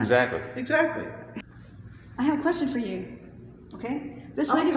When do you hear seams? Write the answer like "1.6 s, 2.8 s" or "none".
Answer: 1.2 s